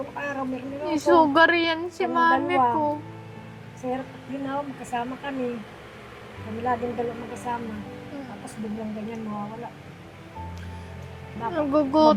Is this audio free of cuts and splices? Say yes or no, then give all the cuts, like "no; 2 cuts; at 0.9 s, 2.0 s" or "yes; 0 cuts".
yes; 0 cuts